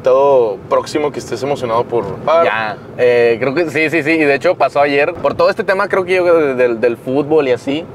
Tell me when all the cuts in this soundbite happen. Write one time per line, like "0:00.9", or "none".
0:02.3
0:05.2